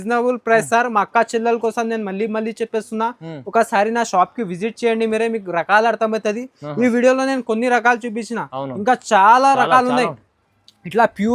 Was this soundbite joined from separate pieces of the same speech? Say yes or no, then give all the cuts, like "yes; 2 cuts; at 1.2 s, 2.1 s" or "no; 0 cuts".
no; 0 cuts